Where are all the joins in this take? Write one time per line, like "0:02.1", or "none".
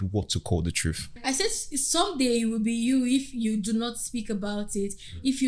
0:01.1